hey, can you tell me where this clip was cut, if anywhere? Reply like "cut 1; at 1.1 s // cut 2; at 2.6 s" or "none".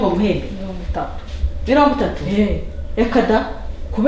none